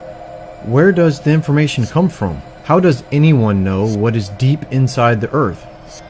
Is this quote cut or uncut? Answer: cut